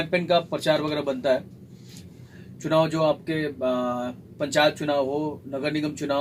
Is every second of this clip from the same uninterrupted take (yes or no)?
no